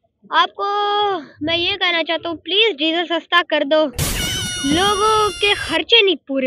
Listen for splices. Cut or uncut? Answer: uncut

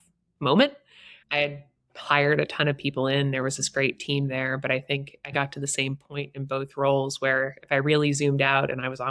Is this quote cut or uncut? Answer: uncut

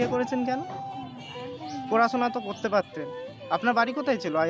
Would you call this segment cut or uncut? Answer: uncut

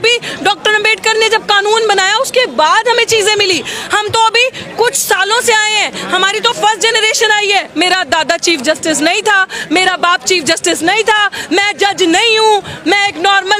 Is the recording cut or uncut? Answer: cut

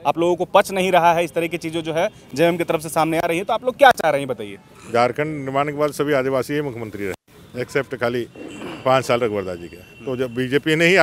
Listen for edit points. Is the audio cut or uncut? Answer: uncut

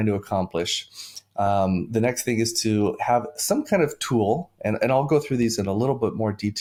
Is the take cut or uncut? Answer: uncut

